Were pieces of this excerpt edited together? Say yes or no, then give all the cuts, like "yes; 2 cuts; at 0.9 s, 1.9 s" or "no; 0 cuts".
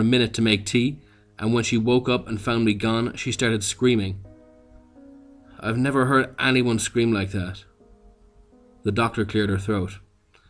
yes; 1 cut; at 6.3 s